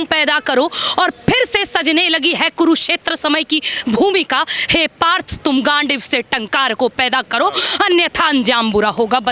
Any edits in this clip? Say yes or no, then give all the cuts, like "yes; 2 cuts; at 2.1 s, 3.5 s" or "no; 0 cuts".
no; 0 cuts